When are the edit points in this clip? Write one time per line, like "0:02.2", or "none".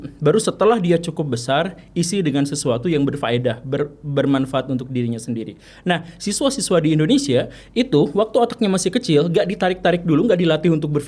none

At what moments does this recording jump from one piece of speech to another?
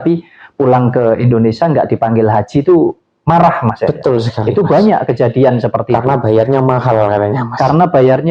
none

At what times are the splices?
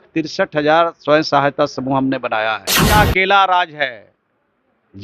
0:02.8

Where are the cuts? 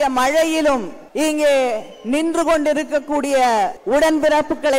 0:01.0
0:03.8

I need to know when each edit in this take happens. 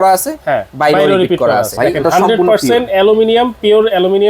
0:01.7

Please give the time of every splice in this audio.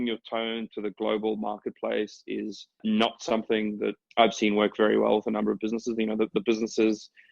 0:02.8
0:04.0

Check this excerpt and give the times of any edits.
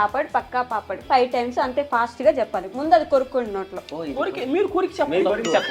0:01.0

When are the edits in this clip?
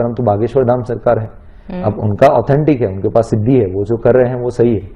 none

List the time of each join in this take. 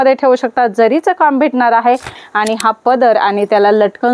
0:02.2

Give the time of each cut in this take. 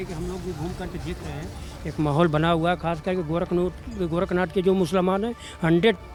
none

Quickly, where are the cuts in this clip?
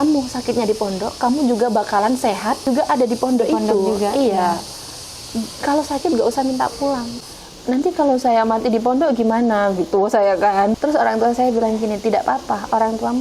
0:02.7
0:07.1
0:10.7

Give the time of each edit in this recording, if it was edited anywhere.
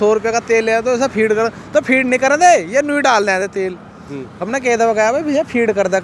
none

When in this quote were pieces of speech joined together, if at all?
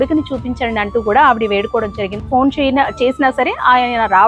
0:02.1

